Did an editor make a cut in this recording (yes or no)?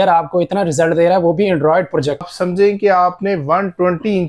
yes